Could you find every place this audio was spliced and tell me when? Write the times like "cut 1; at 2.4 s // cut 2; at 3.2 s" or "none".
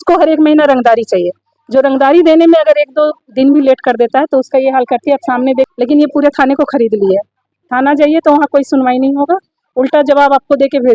cut 1; at 5.7 s